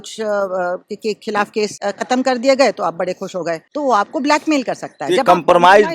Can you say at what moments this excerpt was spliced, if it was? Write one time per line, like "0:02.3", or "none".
0:01.8
0:03.7